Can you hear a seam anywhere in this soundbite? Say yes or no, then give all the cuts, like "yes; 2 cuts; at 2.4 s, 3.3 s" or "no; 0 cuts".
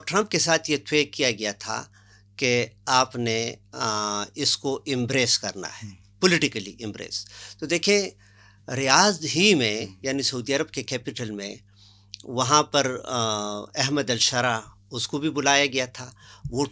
no; 0 cuts